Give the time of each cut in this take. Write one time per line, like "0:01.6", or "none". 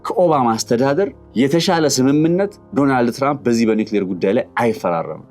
0:01.2
0:02.6

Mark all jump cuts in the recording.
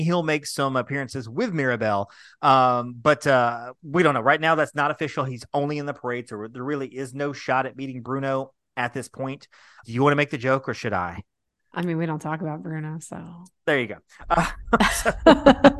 0:09.8

